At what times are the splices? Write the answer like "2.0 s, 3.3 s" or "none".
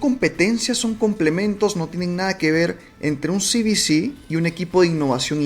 none